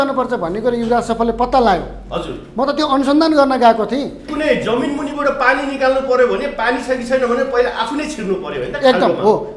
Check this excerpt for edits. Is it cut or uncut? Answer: cut